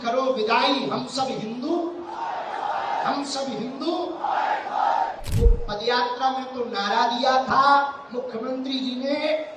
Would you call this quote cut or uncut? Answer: cut